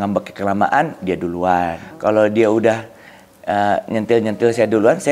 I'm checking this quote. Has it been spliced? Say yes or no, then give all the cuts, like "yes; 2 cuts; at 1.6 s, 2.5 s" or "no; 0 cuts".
yes; 1 cut; at 1.8 s